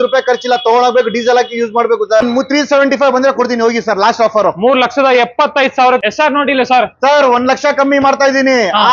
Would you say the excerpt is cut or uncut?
cut